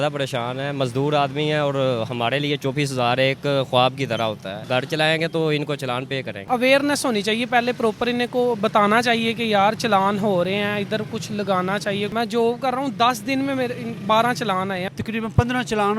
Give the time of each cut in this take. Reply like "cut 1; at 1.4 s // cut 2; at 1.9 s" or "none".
cut 1; at 4.6 s // cut 2; at 6.5 s // cut 3; at 12.1 s // cut 4; at 14.8 s